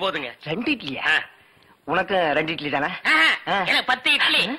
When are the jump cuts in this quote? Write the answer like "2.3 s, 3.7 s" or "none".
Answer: 1.1 s